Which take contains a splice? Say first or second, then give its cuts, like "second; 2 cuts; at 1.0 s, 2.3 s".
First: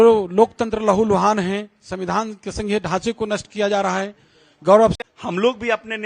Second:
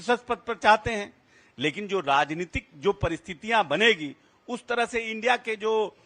first; 1 cut; at 4.9 s